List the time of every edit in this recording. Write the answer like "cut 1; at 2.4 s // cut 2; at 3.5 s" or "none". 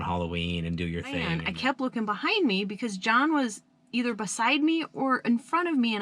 cut 1; at 1.3 s